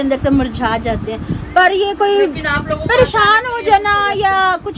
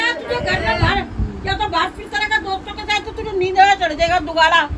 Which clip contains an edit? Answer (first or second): second